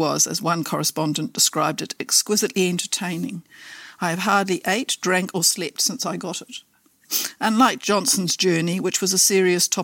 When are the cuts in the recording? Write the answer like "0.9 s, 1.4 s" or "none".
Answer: 7.1 s